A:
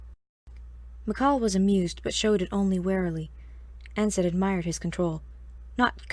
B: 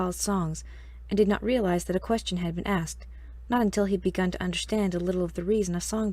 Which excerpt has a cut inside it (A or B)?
B